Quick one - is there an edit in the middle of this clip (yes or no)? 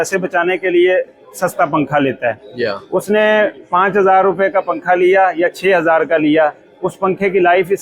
no